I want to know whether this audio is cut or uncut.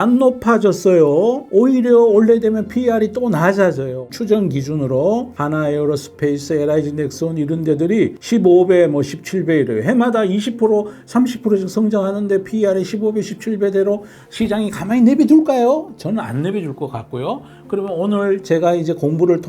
cut